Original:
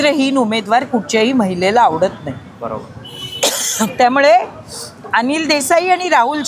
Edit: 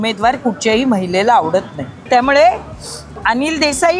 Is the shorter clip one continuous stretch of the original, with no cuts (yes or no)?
no